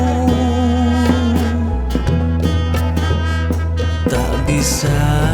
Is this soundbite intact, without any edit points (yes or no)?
yes